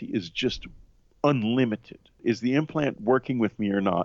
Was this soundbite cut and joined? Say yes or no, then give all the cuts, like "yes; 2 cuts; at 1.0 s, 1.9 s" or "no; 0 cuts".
yes; 1 cut; at 2.2 s